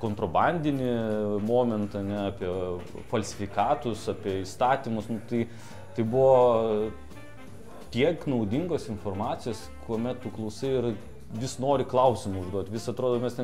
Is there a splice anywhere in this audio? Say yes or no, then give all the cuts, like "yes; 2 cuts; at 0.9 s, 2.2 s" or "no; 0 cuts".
no; 0 cuts